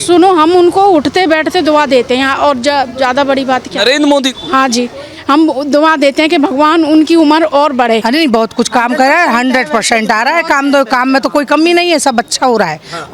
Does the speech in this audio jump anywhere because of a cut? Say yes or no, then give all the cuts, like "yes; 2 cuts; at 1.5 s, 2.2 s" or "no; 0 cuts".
yes; 1 cut; at 8.0 s